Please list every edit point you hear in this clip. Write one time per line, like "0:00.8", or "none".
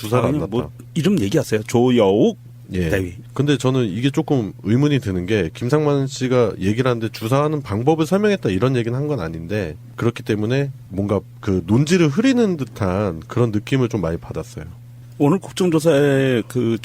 0:13.8